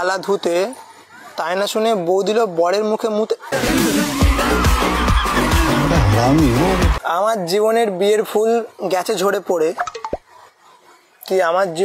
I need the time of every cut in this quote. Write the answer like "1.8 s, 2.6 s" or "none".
7.0 s